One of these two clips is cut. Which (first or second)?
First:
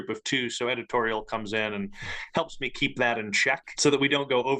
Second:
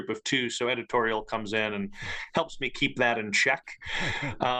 first